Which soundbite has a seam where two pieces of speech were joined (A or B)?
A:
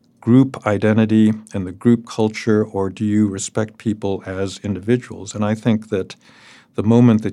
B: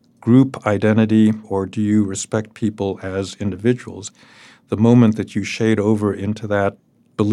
B